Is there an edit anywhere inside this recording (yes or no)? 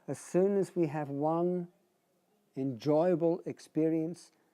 yes